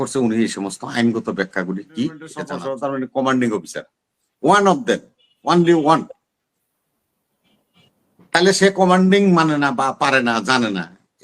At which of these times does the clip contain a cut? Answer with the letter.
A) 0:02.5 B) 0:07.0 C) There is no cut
A